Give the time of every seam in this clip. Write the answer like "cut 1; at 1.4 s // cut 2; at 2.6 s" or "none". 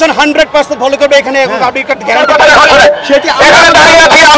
cut 1; at 2.2 s

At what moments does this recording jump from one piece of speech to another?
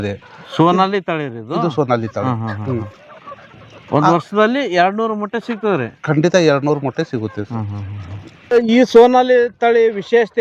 none

